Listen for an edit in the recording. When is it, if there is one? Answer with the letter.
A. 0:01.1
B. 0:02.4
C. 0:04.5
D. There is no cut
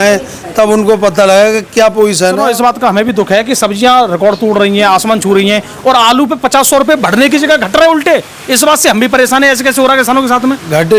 B